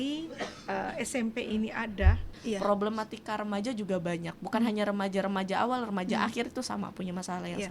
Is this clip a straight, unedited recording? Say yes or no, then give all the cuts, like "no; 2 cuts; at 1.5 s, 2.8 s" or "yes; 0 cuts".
no; 1 cut; at 2.3 s